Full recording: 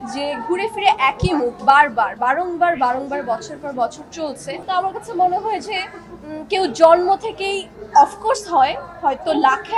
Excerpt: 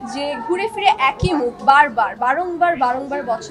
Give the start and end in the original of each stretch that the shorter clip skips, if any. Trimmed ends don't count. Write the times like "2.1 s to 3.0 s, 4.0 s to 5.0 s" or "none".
none